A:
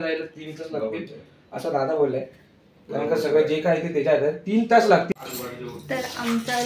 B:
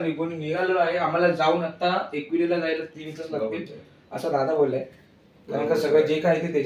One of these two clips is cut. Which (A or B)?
A